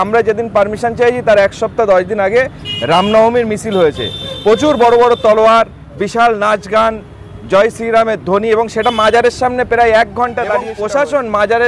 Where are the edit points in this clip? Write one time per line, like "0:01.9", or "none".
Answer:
0:10.7